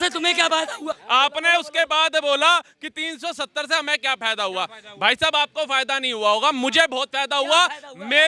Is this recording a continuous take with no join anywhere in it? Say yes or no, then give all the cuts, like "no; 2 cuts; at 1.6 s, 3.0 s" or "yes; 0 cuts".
no; 1 cut; at 1.0 s